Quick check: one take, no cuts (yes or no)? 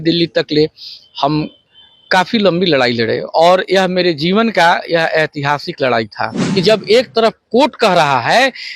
no